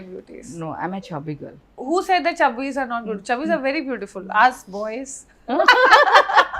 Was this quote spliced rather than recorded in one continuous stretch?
yes; 1 cut; at 1.7 s

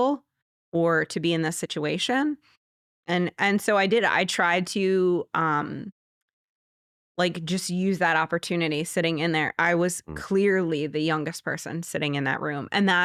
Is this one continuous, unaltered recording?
yes; 0 cuts

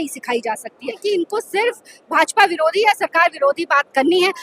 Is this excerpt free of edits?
no; 1 cut; at 1.0 s

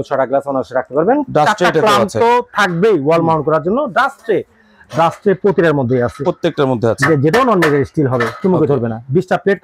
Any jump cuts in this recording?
no; 0 cuts

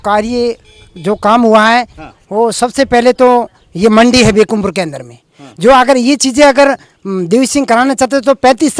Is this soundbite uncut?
yes; 0 cuts

